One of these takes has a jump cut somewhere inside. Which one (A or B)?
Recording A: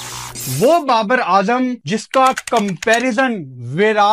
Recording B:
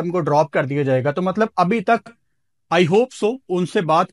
A